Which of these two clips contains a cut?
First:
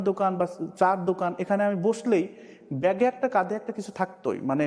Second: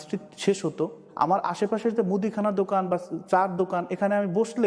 second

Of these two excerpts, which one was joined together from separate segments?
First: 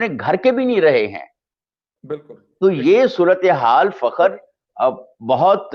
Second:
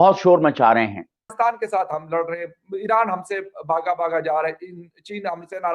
second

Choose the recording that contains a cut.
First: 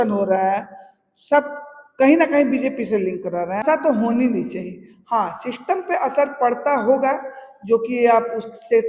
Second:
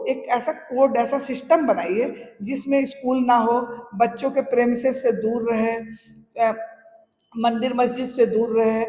first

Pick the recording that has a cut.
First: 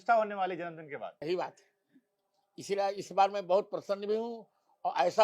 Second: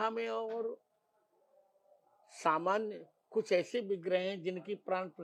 first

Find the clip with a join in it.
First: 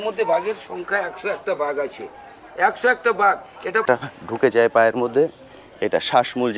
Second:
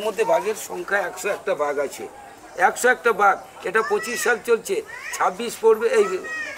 first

